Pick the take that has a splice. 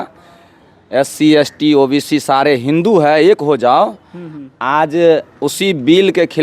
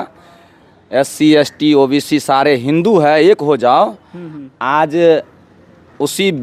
first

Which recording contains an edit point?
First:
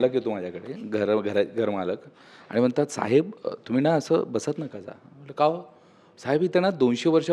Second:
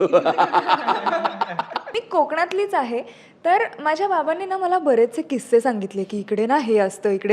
second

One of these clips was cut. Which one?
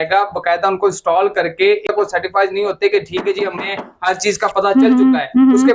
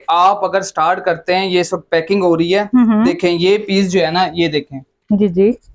first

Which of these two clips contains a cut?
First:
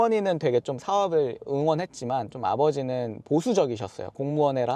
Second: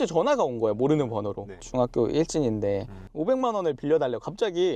second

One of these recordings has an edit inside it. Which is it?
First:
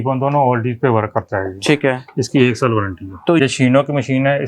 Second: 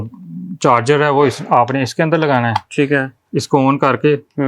first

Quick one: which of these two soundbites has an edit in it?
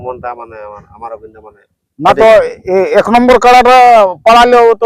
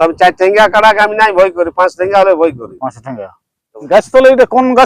second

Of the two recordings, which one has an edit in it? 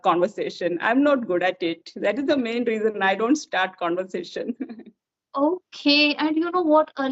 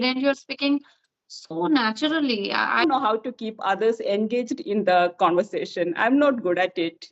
second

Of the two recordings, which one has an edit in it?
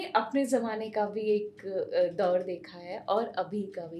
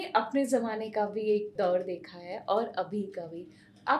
second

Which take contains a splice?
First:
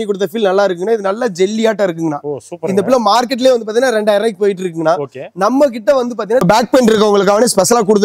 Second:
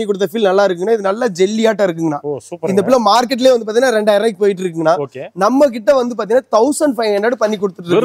first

